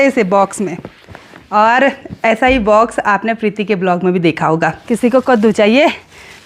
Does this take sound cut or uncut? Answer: cut